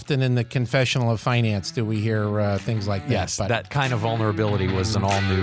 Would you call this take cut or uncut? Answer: uncut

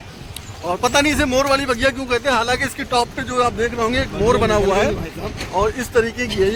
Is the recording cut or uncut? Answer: uncut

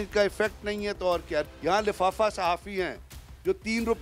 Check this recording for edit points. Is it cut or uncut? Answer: cut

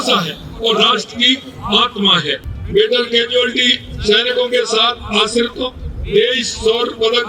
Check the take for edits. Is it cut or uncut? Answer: cut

